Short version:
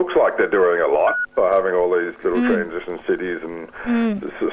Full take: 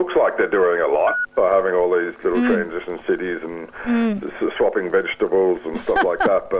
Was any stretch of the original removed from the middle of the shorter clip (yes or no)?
no